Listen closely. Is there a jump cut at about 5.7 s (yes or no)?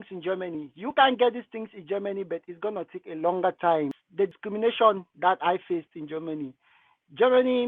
no